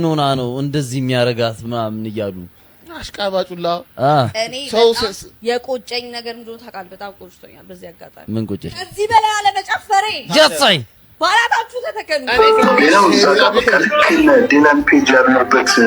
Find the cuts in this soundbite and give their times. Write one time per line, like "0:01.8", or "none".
0:12.3